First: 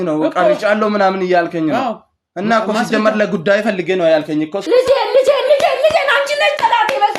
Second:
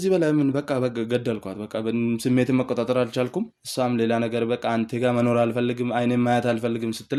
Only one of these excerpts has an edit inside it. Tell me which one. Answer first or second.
first